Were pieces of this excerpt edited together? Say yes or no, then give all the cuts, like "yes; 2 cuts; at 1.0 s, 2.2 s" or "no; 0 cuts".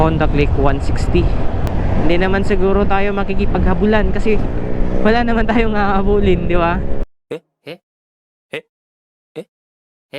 yes; 1 cut; at 1.7 s